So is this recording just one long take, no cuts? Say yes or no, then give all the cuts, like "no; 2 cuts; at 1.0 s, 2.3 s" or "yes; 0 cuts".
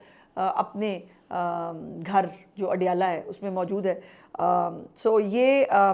yes; 0 cuts